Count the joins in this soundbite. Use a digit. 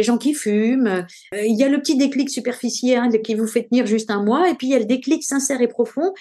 1